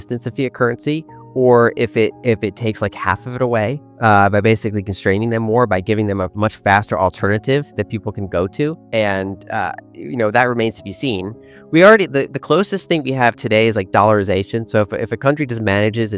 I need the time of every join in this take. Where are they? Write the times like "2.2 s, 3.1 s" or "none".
8.8 s